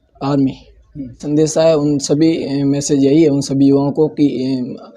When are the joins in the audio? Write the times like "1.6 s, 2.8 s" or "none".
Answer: 1.2 s